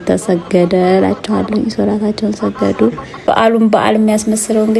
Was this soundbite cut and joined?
yes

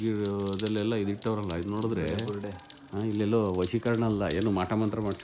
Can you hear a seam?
no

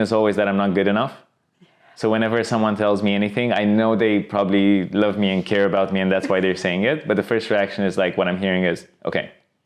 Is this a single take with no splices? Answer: yes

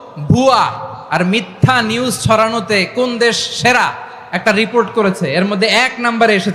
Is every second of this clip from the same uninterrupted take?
yes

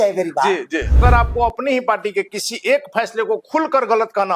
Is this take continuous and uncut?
no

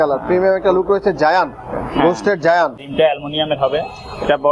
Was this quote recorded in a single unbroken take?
no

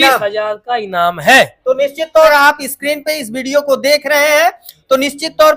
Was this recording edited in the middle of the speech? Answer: yes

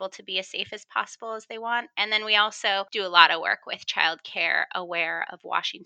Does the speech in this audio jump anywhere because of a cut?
yes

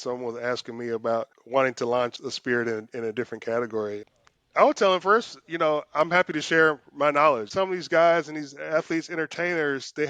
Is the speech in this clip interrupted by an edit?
yes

